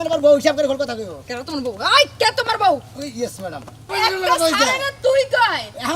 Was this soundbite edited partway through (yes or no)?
yes